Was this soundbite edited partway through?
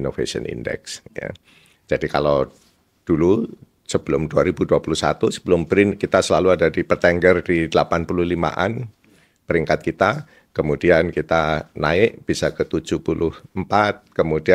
no; 0 cuts

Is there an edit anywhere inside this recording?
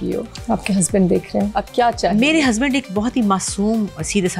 yes; 1 cut; at 1.5 s

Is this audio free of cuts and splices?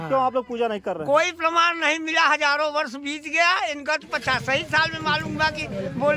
yes; 0 cuts

